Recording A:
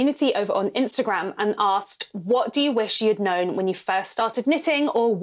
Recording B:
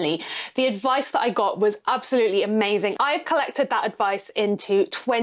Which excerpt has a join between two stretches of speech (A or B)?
B